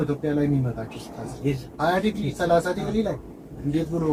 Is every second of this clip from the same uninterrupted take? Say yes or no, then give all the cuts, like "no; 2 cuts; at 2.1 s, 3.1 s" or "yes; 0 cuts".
yes; 0 cuts